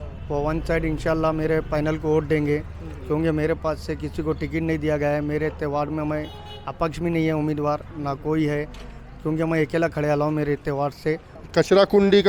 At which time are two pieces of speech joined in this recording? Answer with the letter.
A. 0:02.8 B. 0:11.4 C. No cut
B